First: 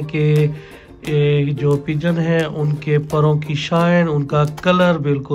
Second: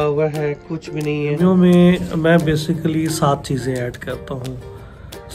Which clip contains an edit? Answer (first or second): second